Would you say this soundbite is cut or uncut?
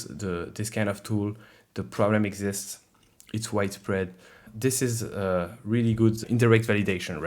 cut